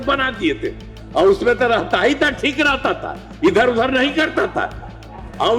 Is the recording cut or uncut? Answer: uncut